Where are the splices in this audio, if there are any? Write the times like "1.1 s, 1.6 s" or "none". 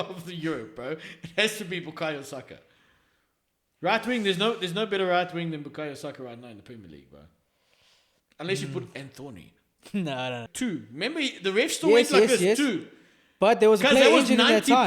10.5 s